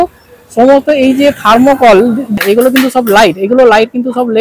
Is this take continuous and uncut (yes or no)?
no